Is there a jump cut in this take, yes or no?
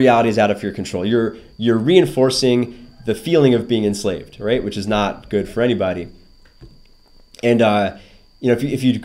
no